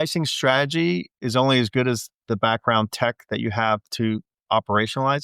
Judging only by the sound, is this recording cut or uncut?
cut